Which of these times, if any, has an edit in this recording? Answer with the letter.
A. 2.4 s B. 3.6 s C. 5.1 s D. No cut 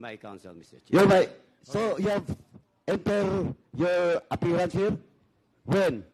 D